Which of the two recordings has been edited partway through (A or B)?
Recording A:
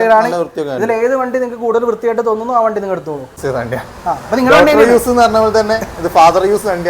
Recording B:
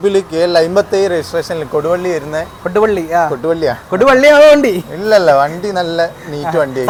A